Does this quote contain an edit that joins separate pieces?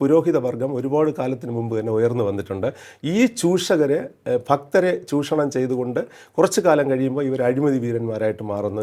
no; 0 cuts

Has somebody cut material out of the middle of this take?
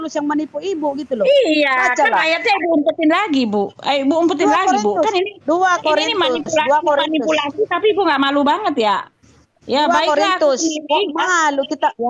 no; 0 cuts

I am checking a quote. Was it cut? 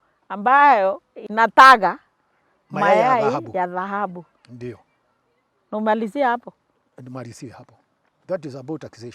yes; 1 cut; at 1.2 s

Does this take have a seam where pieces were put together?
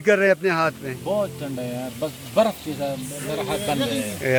no; 0 cuts

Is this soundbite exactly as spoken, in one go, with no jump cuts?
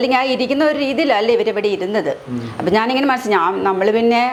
yes; 0 cuts

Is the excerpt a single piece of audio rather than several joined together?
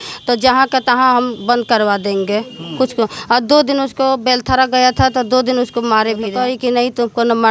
no; 1 cut; at 6.3 s

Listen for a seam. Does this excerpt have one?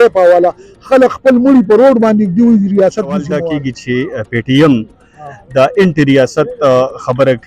yes; 1 cut; at 3.3 s

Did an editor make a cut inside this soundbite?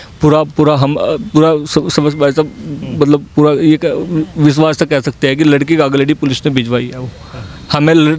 no; 0 cuts

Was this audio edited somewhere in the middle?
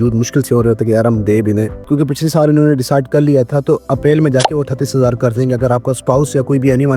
yes; 1 cut; at 1.8 s

